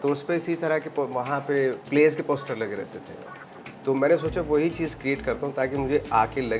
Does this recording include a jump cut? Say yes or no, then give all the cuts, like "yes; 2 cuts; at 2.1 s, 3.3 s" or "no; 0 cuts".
no; 0 cuts